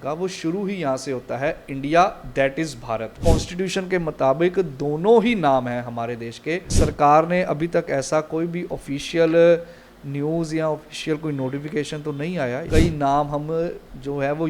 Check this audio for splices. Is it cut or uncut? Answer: cut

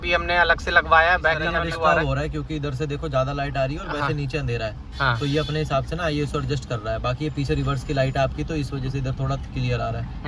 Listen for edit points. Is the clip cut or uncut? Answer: uncut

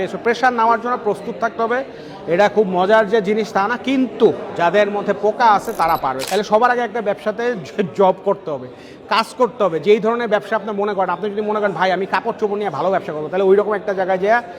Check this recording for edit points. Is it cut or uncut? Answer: cut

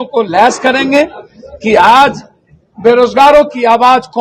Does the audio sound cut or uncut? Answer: uncut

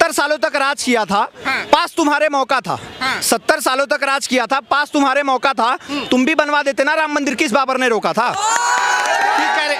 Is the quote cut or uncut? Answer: uncut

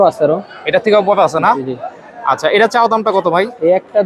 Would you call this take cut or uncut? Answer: uncut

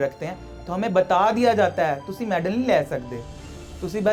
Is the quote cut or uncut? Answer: uncut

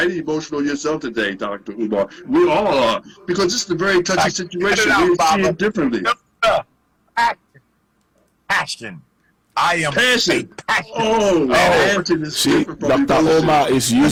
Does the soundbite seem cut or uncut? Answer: uncut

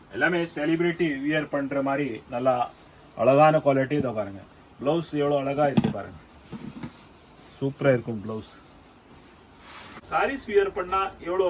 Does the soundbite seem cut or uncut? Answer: cut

